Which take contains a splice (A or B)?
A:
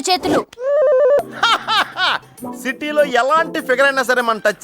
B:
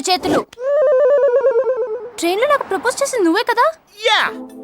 A